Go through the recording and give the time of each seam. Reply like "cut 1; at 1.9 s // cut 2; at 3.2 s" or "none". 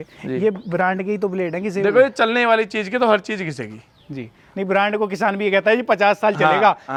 none

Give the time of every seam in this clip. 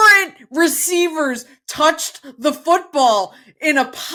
none

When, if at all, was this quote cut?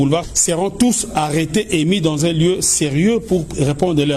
none

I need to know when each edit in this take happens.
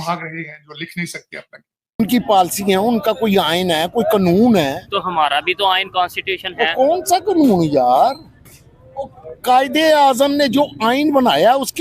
cut 1; at 2.0 s

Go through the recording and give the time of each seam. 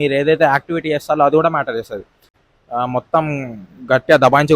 cut 1; at 2.3 s

